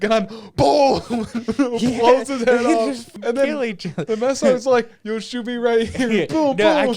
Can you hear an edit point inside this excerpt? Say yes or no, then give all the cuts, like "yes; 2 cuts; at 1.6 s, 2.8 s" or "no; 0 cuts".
yes; 1 cut; at 3.1 s